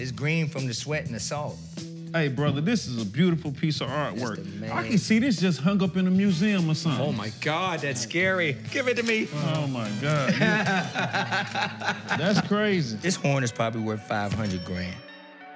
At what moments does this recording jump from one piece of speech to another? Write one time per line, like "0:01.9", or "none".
0:12.9